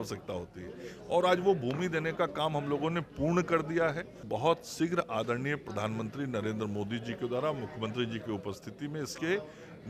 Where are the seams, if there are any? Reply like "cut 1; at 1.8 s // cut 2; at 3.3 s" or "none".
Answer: cut 1; at 4.2 s

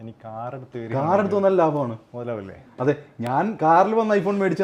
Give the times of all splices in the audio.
none

